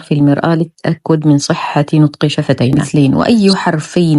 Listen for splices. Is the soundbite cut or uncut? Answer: cut